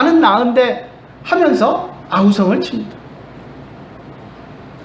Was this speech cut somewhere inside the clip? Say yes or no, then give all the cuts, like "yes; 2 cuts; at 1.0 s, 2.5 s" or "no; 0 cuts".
yes; 1 cut; at 3.4 s